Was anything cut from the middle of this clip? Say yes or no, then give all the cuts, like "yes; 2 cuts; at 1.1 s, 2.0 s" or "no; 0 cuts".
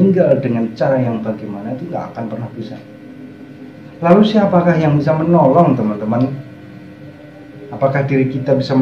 no; 0 cuts